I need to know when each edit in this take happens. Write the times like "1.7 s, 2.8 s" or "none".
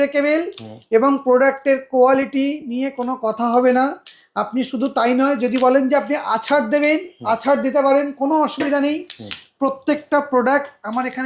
none